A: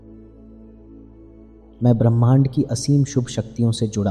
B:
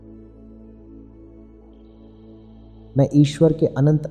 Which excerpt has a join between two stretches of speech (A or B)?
A